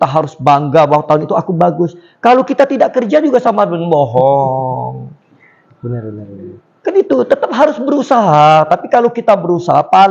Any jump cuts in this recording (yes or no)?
no